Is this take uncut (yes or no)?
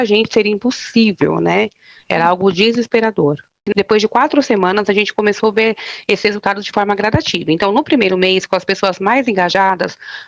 no